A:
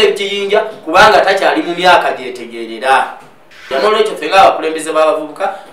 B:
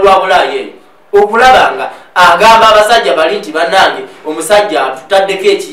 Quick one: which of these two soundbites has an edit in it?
A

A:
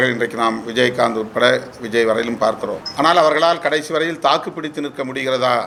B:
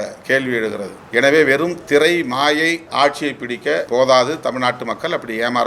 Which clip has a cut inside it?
B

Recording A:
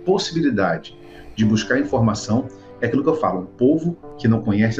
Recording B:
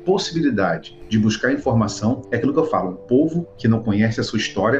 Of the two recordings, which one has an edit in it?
B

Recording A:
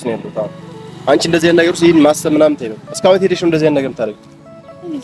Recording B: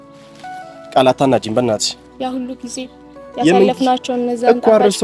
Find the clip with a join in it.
B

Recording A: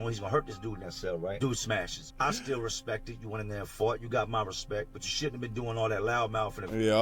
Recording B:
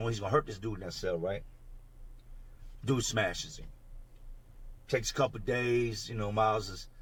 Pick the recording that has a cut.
A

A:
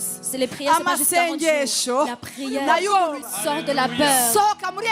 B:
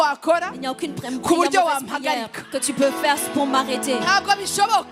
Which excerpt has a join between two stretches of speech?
A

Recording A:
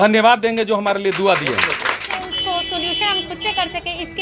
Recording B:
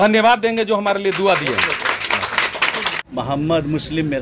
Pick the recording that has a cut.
A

